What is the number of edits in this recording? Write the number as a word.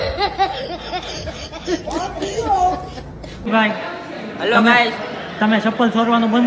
zero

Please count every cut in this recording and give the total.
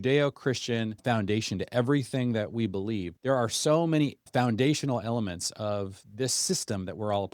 three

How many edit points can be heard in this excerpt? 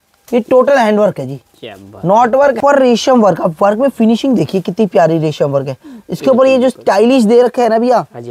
one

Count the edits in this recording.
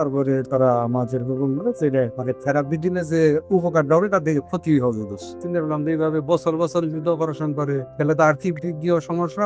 three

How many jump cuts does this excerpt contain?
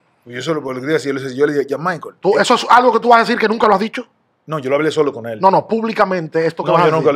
zero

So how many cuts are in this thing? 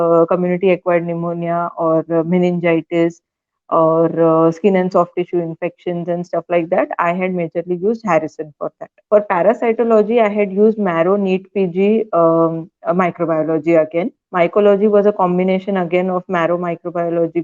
two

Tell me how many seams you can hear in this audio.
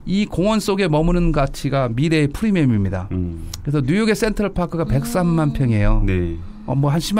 zero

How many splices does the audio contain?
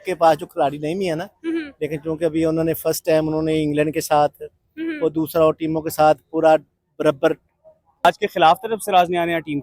one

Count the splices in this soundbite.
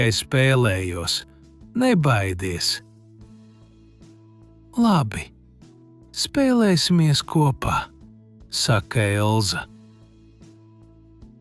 zero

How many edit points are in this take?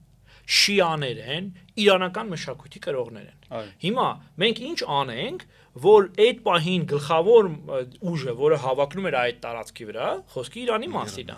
zero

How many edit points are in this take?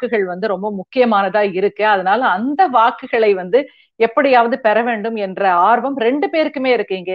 zero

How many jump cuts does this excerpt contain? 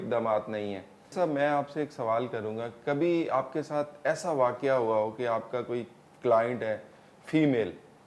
one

